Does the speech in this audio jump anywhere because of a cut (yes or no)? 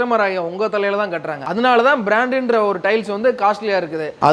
no